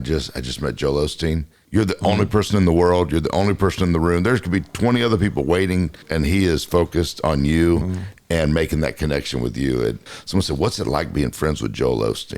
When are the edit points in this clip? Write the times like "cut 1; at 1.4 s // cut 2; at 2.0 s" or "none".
cut 1; at 1.6 s // cut 2; at 6.1 s // cut 3; at 10.0 s

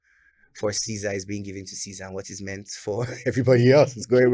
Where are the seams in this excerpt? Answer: none

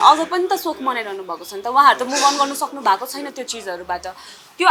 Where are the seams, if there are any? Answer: none

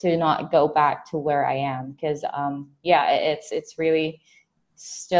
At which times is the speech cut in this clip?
none

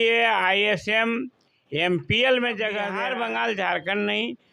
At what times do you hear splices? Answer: cut 1; at 3.0 s

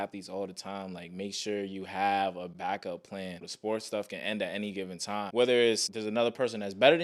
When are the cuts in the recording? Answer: cut 1; at 2.5 s // cut 2; at 3.4 s // cut 3; at 5.2 s // cut 4; at 5.9 s

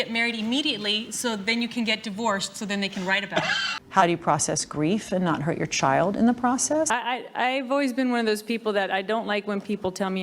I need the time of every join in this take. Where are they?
cut 1; at 3.7 s // cut 2; at 6.9 s

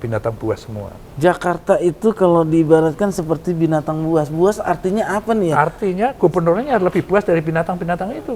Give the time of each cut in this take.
none

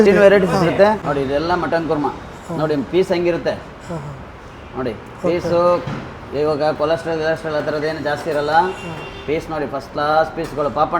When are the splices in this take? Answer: cut 1; at 1.1 s

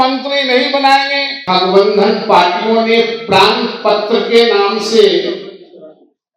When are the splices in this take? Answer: cut 1; at 1.4 s

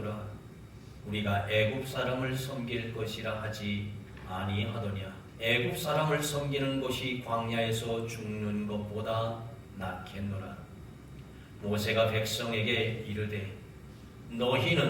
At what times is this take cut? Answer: cut 1; at 5.2 s

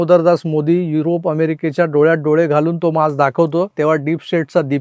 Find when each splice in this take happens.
cut 1; at 3.7 s

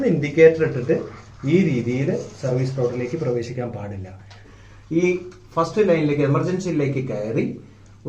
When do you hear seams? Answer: cut 1; at 4.4 s

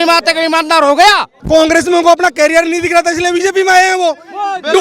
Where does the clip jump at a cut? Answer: cut 1; at 1.3 s

